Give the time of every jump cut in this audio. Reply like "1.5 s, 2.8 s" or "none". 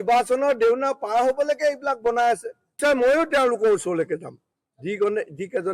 2.8 s